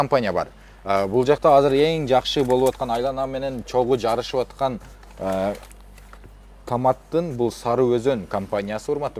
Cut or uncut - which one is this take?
uncut